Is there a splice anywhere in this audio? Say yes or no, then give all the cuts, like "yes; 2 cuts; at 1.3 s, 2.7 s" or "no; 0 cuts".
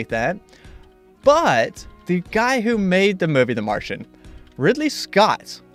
no; 0 cuts